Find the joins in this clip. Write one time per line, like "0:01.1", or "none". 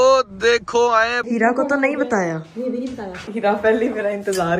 0:01.2
0:03.2